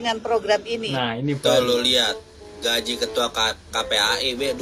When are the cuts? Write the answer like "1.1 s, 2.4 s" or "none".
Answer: none